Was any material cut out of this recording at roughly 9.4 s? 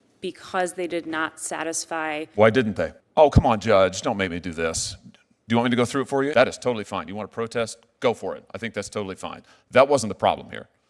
no; 2 cuts; at 3.0 s, 6.3 s

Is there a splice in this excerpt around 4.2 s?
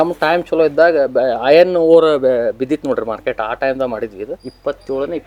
no; 0 cuts

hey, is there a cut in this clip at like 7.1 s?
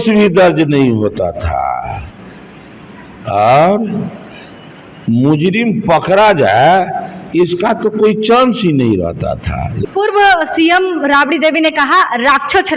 no; 1 cut; at 9.8 s

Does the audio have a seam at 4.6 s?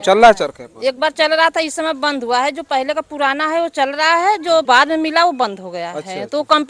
yes; 1 cut; at 4.6 s

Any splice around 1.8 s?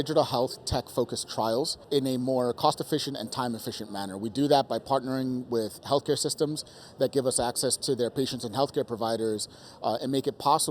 yes; 1 cut; at 1.8 s

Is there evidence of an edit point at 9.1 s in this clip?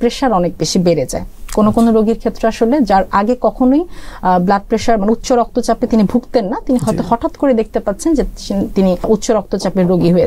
yes; 1 cut; at 9.1 s

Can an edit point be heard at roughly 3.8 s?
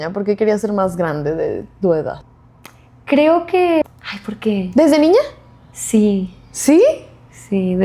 yes; 1 cut; at 3.8 s

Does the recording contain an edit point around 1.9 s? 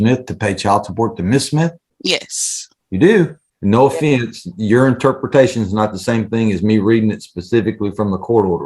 yes; 2 cuts; at 1.9 s, 3.5 s

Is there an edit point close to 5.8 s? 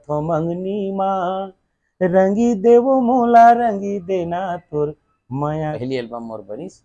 yes; 1 cut; at 5.8 s

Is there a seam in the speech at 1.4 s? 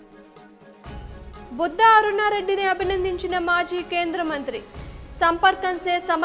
yes; 1 cut; at 1.4 s

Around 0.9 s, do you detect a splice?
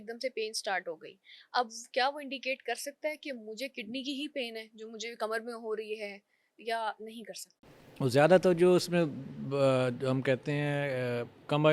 no; 0 cuts

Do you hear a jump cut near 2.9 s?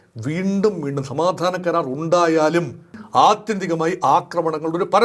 yes; 1 cut; at 2.9 s

